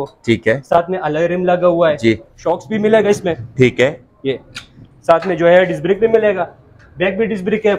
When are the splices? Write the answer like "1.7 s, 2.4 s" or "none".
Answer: 2.3 s